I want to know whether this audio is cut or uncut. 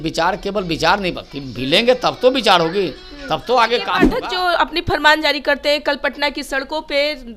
cut